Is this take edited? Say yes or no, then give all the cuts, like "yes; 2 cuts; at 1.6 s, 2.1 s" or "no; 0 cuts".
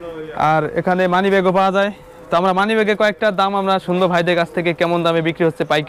no; 0 cuts